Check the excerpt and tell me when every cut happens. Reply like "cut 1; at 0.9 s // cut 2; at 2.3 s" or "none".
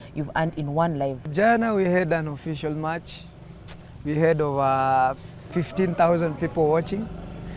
cut 1; at 1.3 s